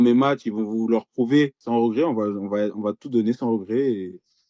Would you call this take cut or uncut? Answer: cut